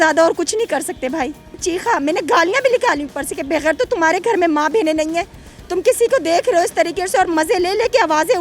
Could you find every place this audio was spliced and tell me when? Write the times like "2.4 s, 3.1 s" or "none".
1.6 s